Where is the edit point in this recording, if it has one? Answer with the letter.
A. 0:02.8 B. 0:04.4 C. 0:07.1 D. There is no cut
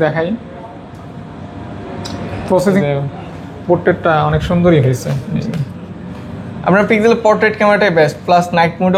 A